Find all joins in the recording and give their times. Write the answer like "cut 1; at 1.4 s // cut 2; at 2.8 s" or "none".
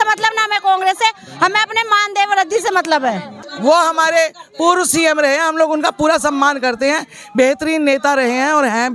cut 1; at 3.5 s